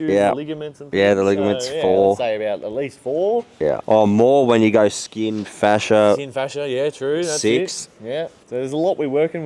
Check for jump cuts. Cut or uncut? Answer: cut